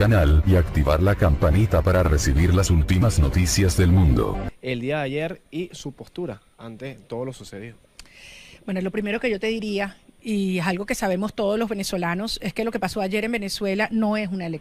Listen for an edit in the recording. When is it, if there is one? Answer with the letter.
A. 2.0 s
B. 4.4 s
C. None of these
B